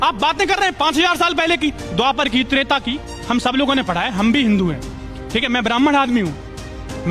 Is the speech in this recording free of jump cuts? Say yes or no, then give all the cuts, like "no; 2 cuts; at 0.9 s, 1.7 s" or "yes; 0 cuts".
yes; 0 cuts